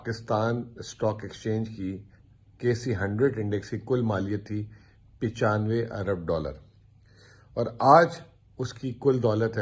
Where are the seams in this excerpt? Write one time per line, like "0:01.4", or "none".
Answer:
none